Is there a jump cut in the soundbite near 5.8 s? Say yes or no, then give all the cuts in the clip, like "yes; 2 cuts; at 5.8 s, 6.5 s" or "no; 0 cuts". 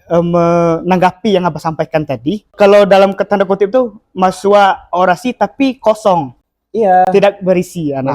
no; 1 cut; at 2.5 s